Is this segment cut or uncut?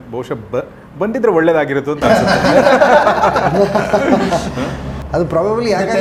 uncut